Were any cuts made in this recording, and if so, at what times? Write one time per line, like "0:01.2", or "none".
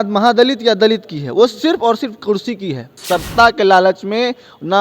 0:03.0